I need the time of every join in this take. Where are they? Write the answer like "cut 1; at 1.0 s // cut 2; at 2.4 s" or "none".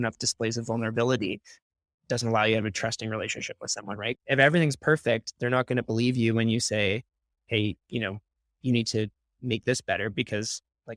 cut 1; at 4.2 s